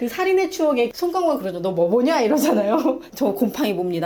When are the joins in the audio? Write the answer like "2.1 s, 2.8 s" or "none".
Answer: 0.9 s